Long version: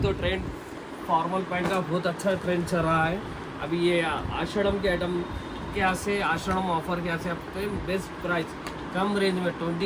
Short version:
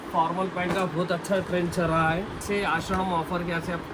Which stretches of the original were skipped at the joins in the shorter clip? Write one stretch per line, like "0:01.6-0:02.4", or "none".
0:03.4-0:06.0